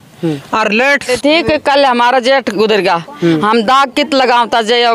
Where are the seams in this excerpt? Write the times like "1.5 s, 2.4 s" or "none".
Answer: 1.1 s

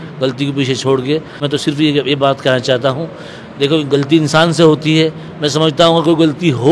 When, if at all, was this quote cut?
1.4 s

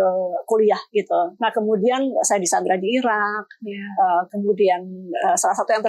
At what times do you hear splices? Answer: 1.3 s

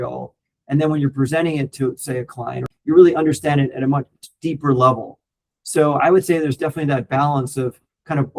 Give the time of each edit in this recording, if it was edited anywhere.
2.7 s

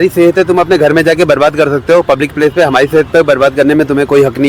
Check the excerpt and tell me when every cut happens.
none

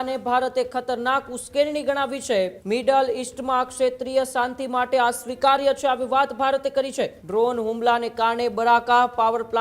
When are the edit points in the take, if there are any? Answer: 2.6 s, 7.2 s

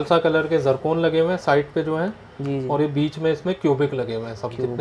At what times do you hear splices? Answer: none

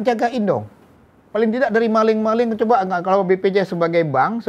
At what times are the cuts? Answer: none

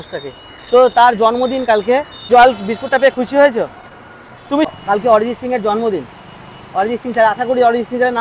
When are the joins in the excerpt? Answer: 2.2 s, 4.7 s

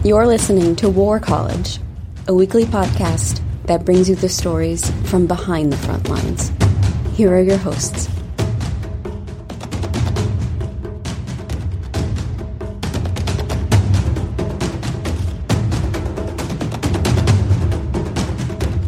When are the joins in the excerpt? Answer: none

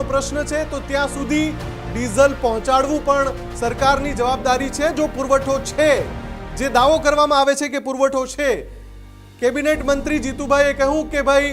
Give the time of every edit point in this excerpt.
none

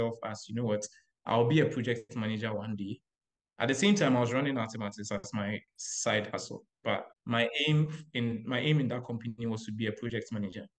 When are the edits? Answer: 7.1 s

